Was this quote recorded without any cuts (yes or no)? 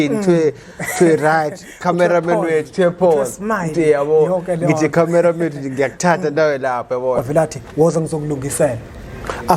no